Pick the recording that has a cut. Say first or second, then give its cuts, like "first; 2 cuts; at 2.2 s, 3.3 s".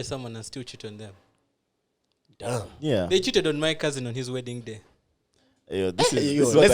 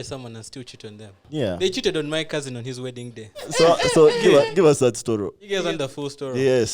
second; 3 cuts; at 1.2 s, 3.5 s, 5.4 s